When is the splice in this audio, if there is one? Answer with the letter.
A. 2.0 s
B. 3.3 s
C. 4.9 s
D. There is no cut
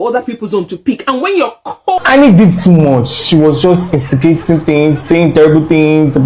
A